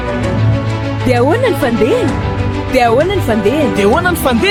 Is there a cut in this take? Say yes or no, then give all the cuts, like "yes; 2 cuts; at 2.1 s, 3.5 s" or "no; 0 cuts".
no; 0 cuts